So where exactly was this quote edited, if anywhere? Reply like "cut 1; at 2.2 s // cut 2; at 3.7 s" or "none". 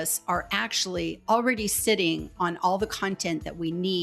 none

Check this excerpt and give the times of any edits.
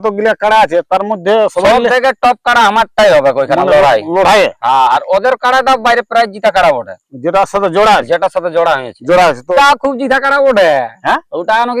cut 1; at 9.5 s

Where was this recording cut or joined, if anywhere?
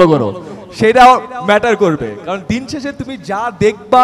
none

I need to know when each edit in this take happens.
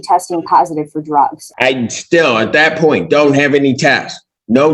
cut 1; at 1.4 s

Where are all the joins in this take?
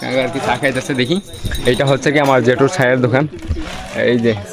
none

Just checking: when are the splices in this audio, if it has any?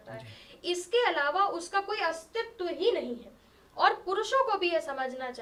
none

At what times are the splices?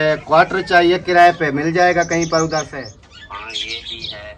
cut 1; at 2.7 s

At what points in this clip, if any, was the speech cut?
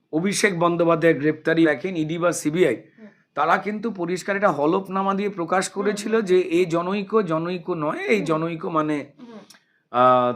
cut 1; at 1.5 s

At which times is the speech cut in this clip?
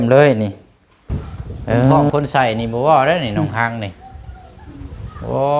cut 1; at 2.1 s

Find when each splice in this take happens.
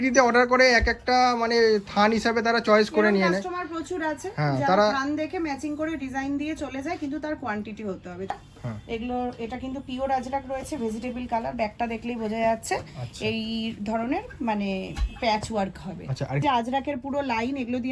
cut 1; at 8.3 s // cut 2; at 16.4 s

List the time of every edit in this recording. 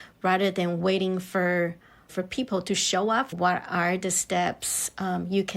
cut 1; at 3.3 s

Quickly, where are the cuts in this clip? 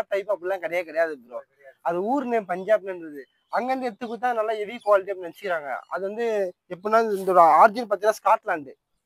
none

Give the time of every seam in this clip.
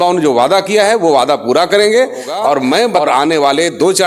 cut 1; at 3.0 s

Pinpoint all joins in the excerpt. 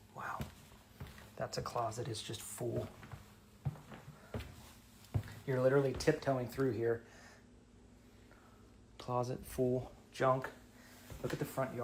none

